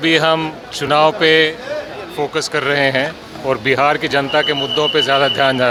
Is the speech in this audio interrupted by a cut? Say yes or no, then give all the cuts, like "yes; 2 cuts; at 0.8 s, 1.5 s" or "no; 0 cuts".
no; 0 cuts